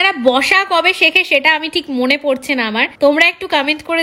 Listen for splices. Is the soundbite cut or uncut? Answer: cut